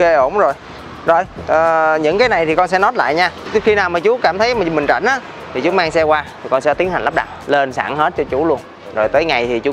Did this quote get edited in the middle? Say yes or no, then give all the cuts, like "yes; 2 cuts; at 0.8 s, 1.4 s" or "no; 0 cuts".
no; 0 cuts